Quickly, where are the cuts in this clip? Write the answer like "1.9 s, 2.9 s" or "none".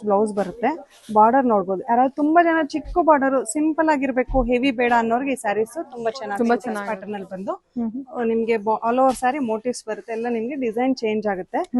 6.9 s